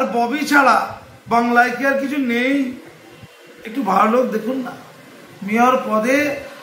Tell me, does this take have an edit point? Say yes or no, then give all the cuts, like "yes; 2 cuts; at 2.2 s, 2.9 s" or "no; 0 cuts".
no; 0 cuts